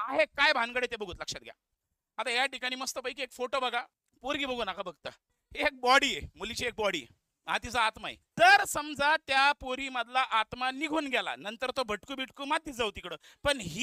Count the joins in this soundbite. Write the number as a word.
two